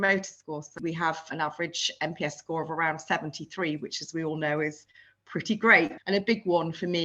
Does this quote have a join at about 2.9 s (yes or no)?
no